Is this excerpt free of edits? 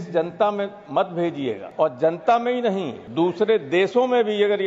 no; 2 cuts; at 1.7 s, 3.0 s

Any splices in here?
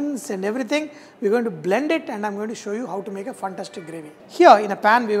no; 0 cuts

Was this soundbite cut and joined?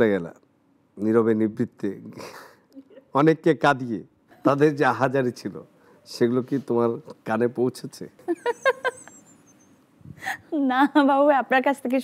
yes; 2 cuts; at 4.3 s, 8.2 s

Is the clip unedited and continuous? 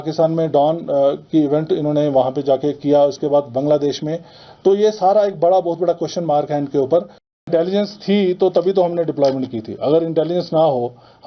no; 1 cut; at 7.4 s

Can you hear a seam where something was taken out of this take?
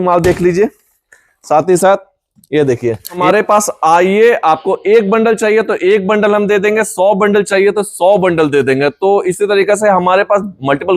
yes; 1 cut; at 3.2 s

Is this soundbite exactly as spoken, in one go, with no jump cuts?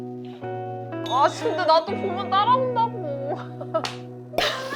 no; 1 cut; at 1.1 s

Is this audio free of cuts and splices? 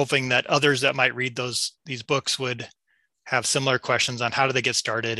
yes; 0 cuts

